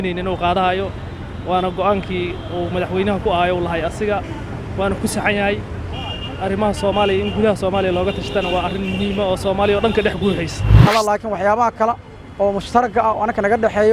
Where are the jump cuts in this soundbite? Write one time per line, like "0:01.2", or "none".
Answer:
0:10.9